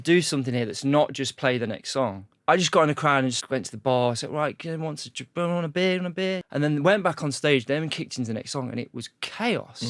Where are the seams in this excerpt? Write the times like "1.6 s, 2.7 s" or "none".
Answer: 2.3 s, 3.4 s, 6.4 s